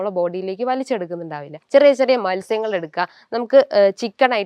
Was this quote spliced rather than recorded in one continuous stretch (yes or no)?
yes